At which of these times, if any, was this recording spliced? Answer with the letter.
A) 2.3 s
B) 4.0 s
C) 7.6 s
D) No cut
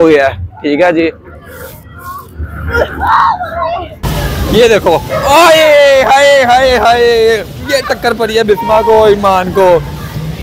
B